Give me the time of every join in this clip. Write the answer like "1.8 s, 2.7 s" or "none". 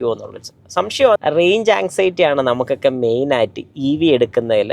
1.2 s